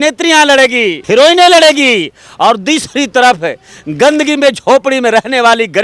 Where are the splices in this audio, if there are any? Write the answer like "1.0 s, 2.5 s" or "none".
1.0 s